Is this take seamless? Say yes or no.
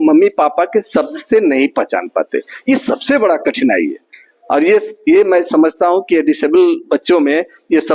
yes